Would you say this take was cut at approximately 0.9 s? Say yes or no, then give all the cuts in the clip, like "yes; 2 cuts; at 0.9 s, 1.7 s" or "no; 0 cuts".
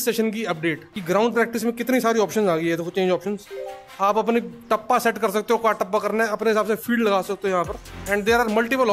yes; 1 cut; at 0.9 s